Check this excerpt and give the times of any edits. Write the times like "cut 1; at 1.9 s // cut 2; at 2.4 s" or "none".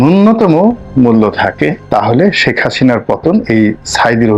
cut 1; at 1.8 s